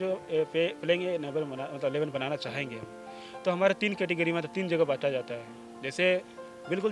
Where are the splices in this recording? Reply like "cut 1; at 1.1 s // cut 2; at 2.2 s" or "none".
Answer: none